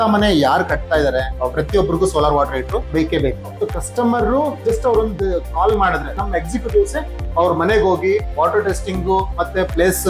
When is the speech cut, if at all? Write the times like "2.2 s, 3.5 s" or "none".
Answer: 3.0 s, 4.6 s, 6.2 s